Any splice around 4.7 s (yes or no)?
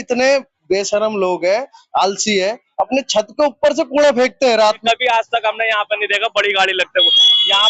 yes